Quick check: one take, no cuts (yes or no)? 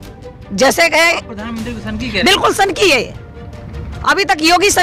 yes